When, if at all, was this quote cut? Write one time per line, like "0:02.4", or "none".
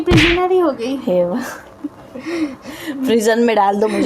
none